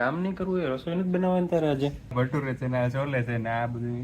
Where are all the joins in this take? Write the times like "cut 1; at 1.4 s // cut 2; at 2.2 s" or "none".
cut 1; at 2.1 s

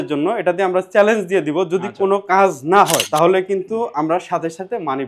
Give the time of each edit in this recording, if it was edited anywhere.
none

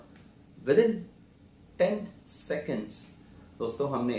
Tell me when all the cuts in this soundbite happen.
none

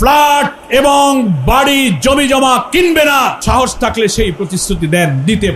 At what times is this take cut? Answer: cut 1; at 3.4 s

